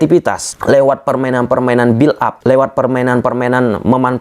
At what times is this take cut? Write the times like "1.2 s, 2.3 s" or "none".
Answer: 2.4 s